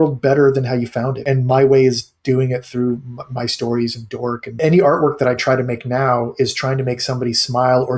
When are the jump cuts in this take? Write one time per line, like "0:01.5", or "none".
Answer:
0:01.2
0:04.6